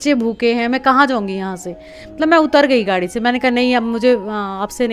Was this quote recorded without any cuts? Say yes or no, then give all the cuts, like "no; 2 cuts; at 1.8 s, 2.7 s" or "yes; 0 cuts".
yes; 0 cuts